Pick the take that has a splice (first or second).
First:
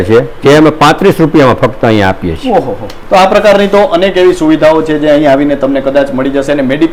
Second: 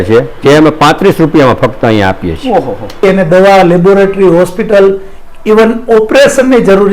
second